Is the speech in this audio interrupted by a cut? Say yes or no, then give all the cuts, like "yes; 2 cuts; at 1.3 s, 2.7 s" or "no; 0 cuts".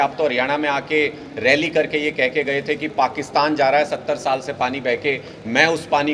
no; 0 cuts